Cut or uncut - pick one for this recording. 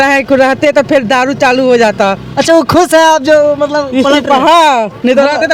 uncut